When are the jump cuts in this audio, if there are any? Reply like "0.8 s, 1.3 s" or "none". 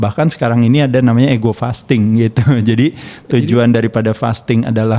none